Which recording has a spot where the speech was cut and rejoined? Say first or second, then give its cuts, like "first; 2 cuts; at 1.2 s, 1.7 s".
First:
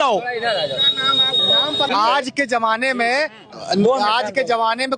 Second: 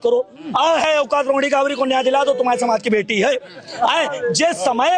first; 1 cut; at 1.9 s